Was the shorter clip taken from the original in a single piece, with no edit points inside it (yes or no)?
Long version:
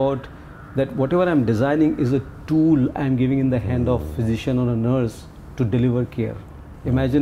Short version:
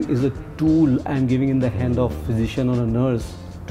yes